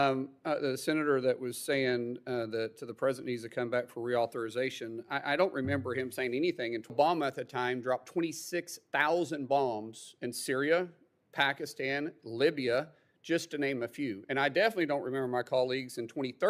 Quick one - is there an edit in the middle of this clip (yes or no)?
yes